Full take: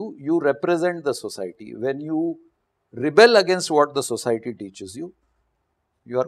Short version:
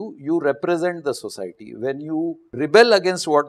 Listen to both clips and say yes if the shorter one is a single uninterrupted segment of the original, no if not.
no